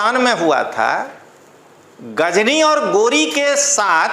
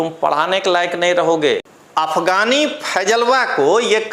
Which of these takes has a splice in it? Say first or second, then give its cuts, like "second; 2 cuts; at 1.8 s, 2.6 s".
second; 1 cut; at 1.6 s